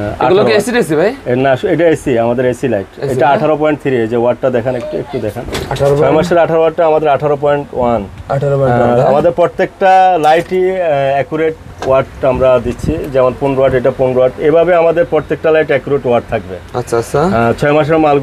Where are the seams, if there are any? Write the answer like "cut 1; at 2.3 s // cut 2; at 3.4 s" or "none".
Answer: none